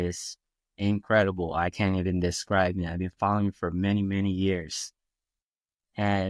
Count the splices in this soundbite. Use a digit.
0